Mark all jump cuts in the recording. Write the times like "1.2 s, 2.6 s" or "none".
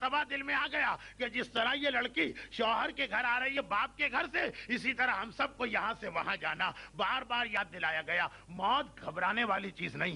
none